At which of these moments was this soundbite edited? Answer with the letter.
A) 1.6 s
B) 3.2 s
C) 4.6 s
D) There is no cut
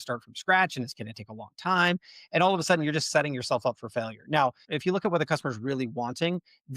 C